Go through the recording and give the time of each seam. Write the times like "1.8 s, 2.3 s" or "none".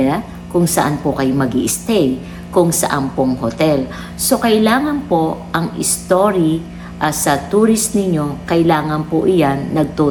none

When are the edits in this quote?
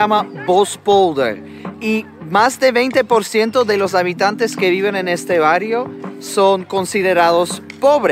none

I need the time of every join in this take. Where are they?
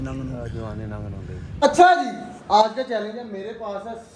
1.6 s

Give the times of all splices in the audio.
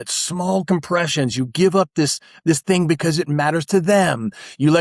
none

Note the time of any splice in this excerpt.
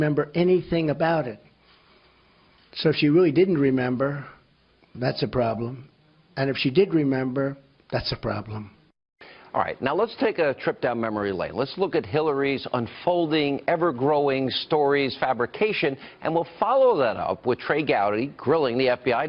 none

